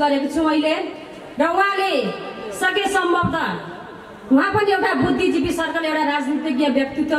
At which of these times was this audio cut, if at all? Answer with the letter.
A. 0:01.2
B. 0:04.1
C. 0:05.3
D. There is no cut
D